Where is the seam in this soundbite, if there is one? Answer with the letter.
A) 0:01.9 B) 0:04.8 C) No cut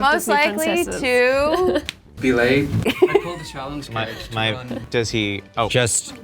B